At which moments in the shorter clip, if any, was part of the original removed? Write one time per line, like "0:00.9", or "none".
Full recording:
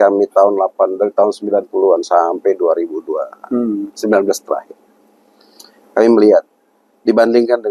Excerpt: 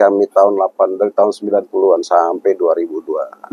none